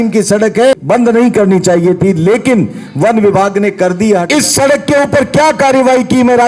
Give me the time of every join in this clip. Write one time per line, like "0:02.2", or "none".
0:00.8
0:04.2